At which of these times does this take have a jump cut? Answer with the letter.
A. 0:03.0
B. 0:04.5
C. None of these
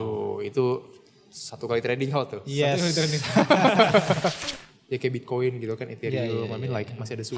B